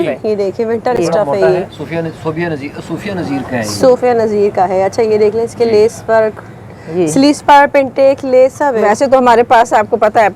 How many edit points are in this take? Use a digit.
0